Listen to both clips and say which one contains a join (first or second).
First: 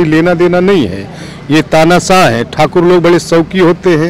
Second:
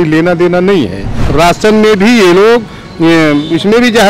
second